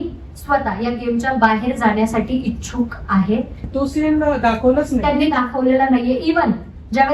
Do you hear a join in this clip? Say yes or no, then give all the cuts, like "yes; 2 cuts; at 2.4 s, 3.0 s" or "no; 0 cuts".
yes; 1 cut; at 3.6 s